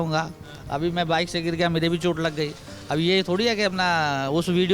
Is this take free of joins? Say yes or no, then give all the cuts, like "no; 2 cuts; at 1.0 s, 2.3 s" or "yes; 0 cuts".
yes; 0 cuts